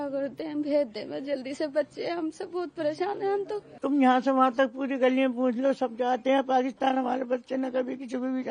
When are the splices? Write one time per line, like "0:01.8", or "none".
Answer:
0:03.6